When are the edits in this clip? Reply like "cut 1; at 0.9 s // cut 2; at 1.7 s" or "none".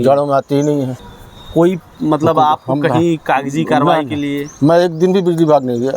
cut 1; at 1.0 s